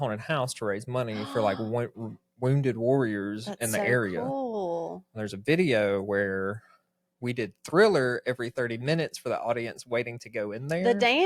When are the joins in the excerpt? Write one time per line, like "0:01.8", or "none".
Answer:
none